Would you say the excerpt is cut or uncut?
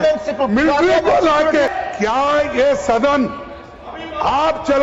cut